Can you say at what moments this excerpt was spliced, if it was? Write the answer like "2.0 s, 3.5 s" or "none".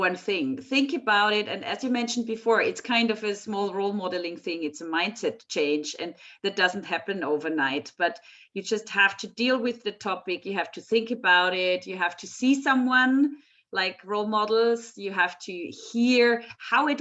none